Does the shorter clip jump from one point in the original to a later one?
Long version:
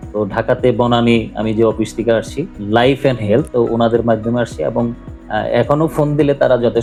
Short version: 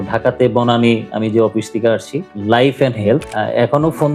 yes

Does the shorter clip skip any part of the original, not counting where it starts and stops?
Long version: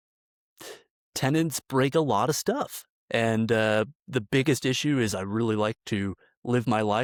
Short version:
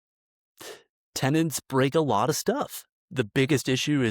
yes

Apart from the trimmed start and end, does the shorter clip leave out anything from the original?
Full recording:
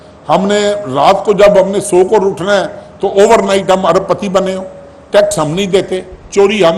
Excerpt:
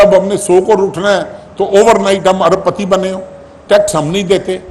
no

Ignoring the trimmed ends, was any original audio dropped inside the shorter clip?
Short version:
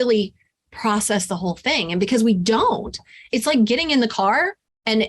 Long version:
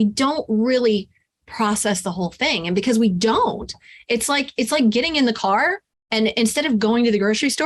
yes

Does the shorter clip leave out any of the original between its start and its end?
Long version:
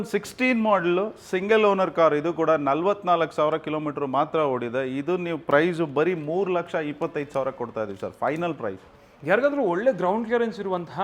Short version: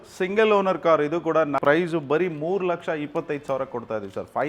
yes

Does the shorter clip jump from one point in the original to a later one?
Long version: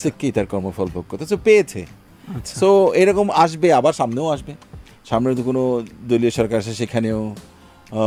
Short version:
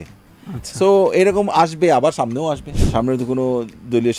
yes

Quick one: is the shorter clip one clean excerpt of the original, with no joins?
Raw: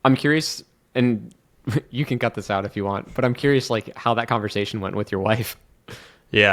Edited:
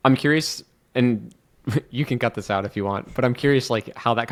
yes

